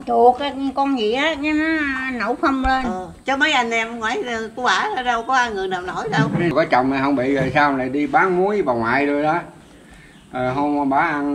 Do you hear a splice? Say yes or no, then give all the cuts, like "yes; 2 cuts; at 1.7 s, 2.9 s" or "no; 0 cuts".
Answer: yes; 1 cut; at 6.5 s